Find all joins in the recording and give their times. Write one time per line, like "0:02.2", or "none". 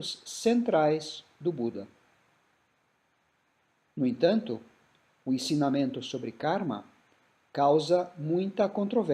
none